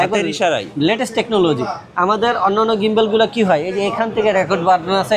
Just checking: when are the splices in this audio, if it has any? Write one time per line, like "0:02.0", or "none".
none

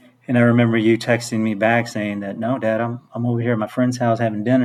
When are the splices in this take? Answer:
none

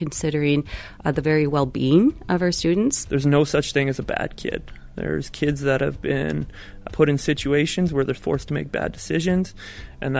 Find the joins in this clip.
0:03.0
0:08.2

